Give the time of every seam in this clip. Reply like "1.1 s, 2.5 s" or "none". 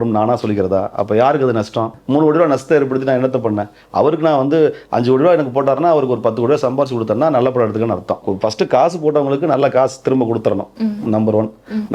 2.0 s, 8.2 s